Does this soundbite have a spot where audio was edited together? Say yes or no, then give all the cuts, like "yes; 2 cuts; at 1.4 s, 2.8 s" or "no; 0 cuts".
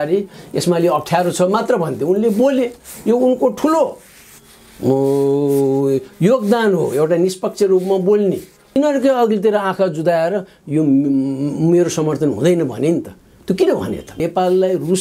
yes; 2 cuts; at 8.8 s, 14.2 s